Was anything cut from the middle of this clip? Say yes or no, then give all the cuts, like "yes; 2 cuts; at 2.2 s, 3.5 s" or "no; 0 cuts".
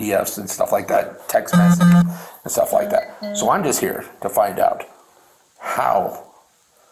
no; 0 cuts